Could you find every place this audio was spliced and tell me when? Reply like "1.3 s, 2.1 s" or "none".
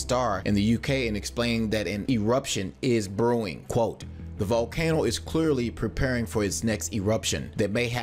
5.2 s